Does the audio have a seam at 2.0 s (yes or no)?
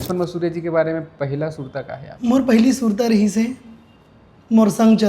yes